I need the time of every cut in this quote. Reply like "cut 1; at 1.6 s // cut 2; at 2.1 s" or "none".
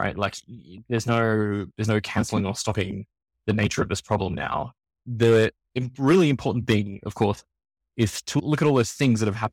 cut 1; at 5.0 s // cut 2; at 8.4 s